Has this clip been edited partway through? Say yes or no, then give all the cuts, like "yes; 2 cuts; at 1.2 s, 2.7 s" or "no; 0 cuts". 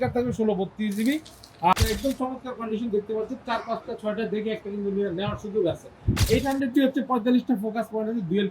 yes; 2 cuts; at 1.7 s, 6.2 s